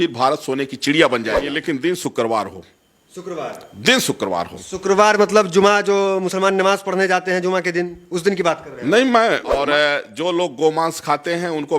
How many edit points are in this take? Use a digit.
2